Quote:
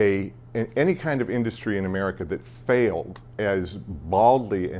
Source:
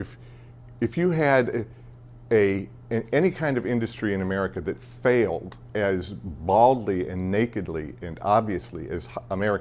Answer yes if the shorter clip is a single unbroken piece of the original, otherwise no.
yes